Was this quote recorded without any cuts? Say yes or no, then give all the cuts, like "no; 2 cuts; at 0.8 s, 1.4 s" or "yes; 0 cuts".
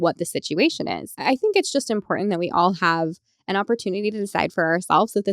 no; 1 cut; at 1.1 s